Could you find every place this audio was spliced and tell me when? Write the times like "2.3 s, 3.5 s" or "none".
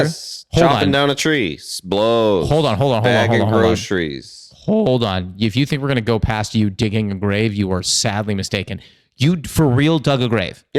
none

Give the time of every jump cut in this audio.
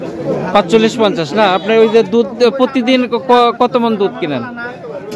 none

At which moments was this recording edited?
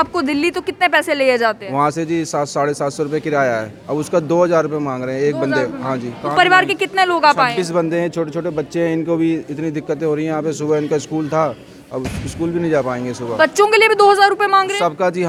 none

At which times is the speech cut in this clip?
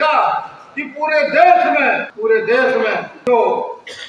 2.1 s, 3.1 s

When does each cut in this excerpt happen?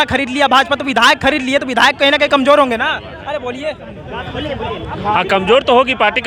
none

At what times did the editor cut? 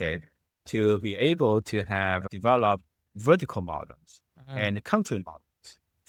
none

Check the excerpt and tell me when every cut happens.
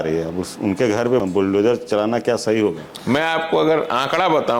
1.2 s, 2.9 s

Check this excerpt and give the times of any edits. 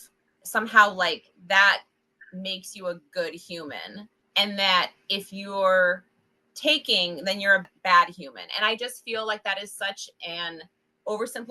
7.6 s

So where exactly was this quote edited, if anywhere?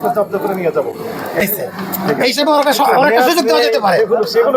1.4 s

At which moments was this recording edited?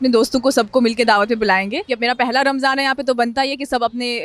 1.8 s

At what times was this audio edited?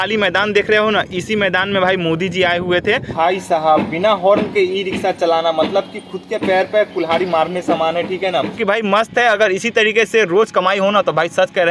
3.1 s, 8.6 s

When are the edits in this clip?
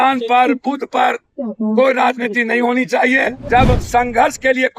3.4 s

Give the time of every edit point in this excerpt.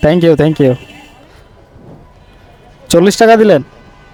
none

